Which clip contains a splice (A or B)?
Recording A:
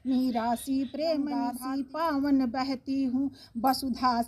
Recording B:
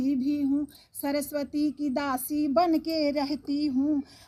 A